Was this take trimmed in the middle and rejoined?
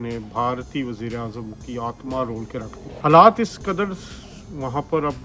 no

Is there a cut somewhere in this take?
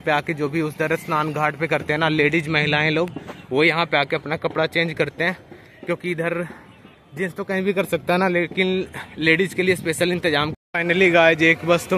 yes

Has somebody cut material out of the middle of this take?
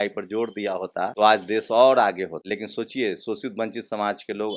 yes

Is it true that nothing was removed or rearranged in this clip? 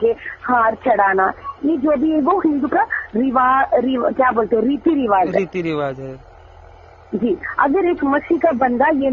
yes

